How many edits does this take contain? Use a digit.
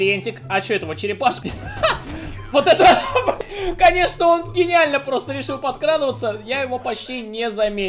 2